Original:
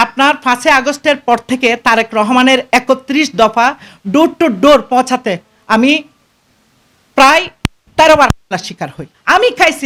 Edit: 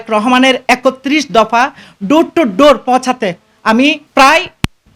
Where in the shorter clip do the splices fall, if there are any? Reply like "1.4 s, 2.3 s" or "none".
4.0 s